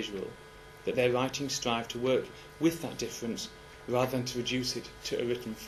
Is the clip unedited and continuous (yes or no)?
yes